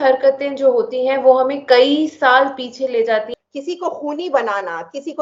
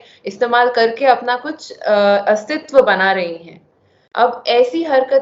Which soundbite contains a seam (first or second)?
first